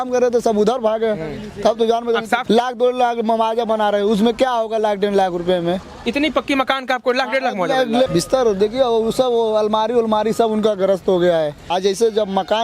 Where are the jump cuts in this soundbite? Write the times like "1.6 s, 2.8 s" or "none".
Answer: 2.4 s, 8.1 s, 11.7 s